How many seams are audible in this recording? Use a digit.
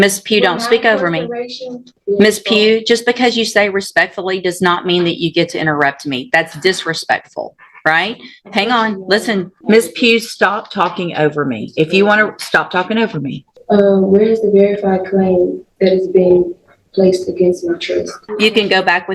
4